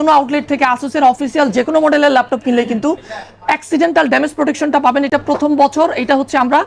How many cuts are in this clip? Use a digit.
0